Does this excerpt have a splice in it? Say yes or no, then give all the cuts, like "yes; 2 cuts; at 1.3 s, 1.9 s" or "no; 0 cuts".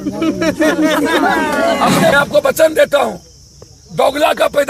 yes; 1 cut; at 2.1 s